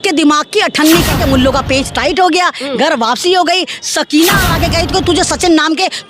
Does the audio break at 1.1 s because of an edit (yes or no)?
yes